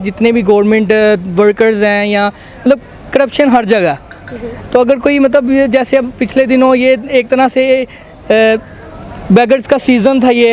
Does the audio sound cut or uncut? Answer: uncut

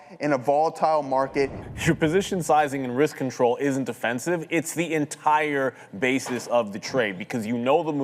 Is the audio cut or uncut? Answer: cut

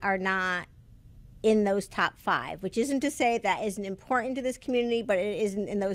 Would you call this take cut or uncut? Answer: cut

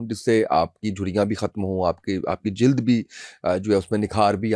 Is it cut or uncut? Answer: uncut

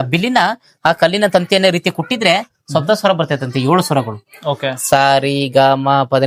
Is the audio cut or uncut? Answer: uncut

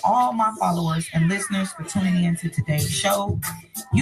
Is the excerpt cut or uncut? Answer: uncut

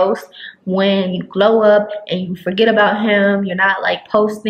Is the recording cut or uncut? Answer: uncut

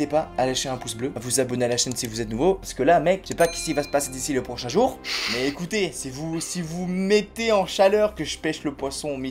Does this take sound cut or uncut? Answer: uncut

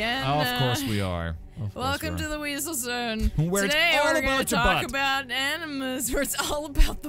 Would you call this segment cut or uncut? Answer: uncut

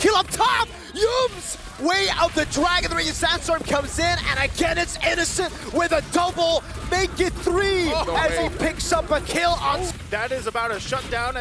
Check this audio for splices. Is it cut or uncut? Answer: cut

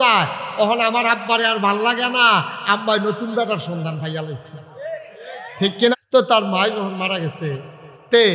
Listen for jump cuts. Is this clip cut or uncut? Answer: cut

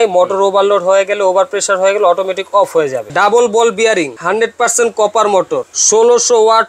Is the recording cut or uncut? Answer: cut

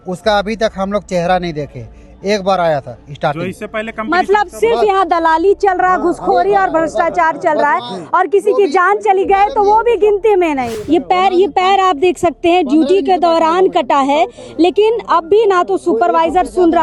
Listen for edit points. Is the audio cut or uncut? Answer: cut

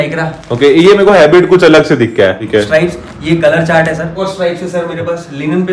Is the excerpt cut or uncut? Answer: cut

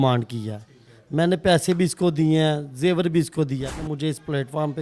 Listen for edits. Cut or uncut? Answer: cut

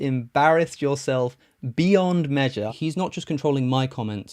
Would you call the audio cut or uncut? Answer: cut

